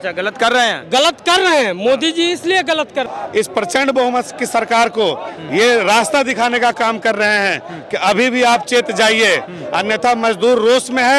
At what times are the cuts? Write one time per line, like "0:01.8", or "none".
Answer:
0:03.1